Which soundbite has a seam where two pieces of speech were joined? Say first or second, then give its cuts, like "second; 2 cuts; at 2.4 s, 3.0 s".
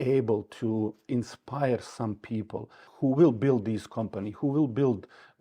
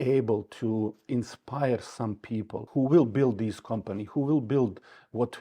second; 1 cut; at 2.6 s